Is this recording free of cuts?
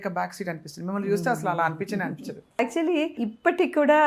yes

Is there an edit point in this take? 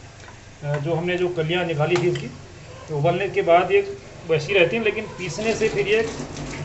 no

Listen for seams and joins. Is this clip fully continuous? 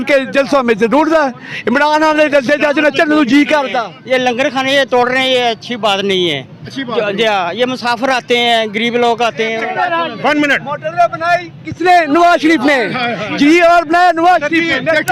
no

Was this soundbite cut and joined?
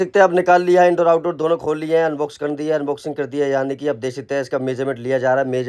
no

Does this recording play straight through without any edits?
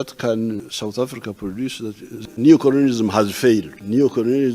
no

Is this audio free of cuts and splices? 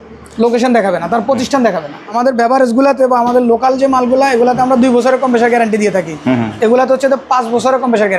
no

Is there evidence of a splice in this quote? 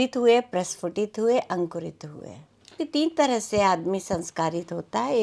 yes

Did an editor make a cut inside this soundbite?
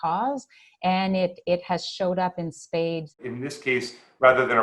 yes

